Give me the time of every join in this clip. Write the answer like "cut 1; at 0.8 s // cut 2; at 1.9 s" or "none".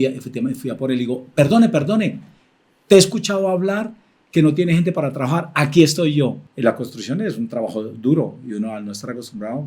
cut 1; at 6.5 s